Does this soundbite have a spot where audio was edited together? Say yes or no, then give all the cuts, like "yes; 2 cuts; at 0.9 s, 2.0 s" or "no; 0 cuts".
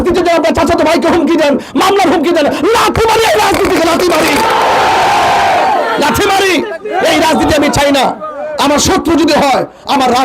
no; 0 cuts